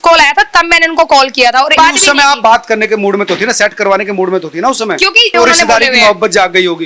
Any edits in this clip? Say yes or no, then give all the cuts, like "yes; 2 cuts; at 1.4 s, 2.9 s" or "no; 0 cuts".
yes; 2 cuts; at 1.7 s, 5.3 s